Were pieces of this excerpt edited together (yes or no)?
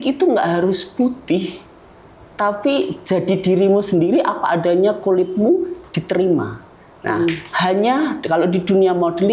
no